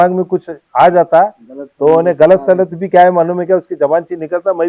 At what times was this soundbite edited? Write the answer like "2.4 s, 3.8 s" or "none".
none

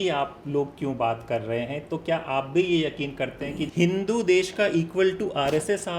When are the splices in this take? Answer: 3.7 s

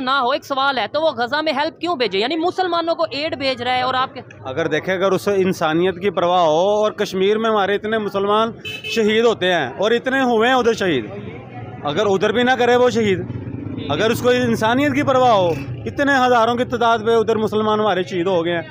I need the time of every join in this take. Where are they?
none

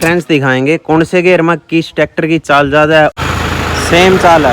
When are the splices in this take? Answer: 3.1 s

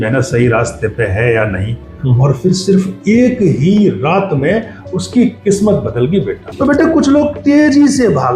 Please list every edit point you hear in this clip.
6.4 s

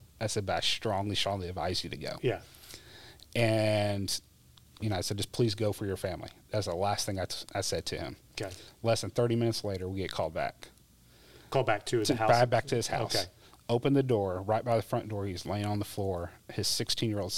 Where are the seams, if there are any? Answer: none

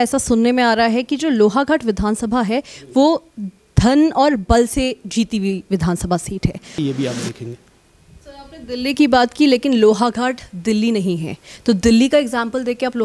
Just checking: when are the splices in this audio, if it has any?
6.7 s

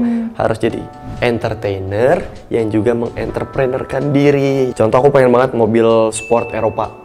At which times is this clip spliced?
4.7 s

